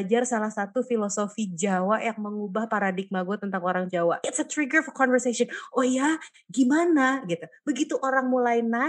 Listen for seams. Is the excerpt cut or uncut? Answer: cut